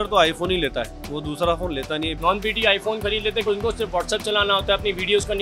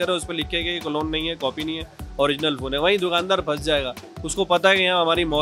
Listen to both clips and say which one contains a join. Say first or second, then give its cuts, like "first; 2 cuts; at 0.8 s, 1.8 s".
first; 2 cuts; at 2.1 s, 3.5 s